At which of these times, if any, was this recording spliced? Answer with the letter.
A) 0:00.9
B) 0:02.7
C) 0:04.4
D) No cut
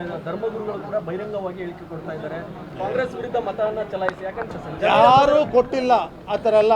C